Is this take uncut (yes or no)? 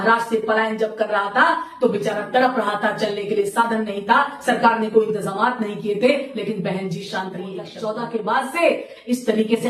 no